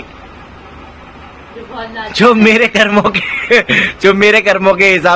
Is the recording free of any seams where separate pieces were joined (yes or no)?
yes